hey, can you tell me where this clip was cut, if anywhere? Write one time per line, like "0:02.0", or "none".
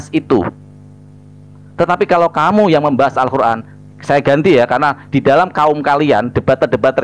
none